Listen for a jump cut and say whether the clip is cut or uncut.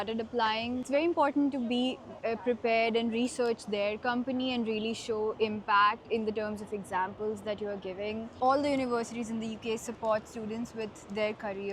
cut